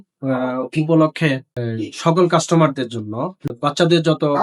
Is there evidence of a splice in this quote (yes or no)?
yes